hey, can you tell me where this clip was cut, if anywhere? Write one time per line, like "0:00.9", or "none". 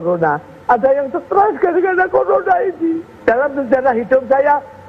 0:03.1

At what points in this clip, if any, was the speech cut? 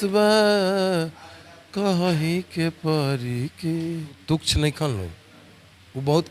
0:04.2

